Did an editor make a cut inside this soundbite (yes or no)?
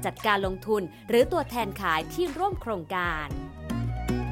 yes